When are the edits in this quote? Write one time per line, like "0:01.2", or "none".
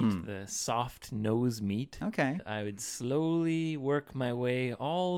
0:02.4